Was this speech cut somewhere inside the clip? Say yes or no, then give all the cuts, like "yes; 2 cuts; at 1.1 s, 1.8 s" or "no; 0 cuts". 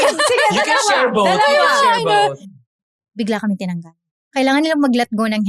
yes; 2 cuts; at 2.4 s, 4.2 s